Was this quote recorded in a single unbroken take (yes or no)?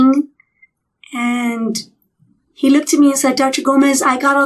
yes